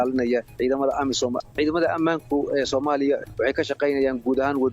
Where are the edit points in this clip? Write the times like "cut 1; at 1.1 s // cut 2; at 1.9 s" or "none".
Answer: cut 1; at 1.5 s // cut 2; at 3.3 s